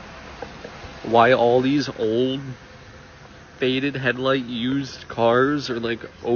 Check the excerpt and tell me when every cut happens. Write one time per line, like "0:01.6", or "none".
none